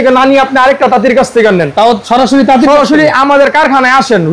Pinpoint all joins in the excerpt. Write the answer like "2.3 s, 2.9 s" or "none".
none